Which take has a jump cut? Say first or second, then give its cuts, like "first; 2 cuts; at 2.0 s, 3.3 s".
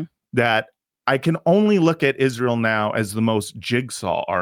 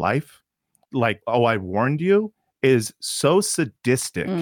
second; 1 cut; at 0.9 s